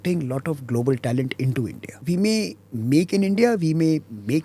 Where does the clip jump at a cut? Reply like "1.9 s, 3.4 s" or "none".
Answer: 1.9 s